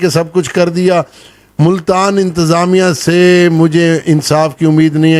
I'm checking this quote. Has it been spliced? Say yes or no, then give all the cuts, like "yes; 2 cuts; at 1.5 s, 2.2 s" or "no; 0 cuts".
no; 0 cuts